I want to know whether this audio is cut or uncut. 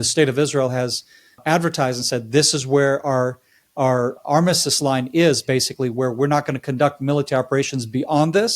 cut